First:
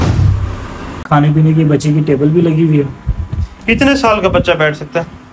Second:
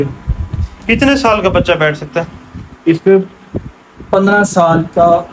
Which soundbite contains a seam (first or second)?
first